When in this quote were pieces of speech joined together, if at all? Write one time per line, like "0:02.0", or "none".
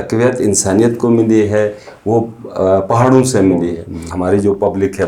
0:04.1

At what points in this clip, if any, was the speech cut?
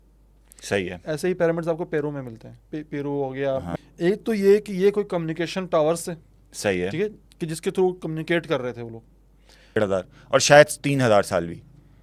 0:03.8
0:09.8

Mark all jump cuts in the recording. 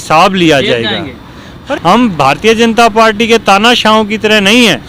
0:01.6

